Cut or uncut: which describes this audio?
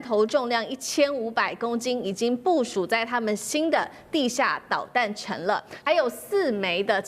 cut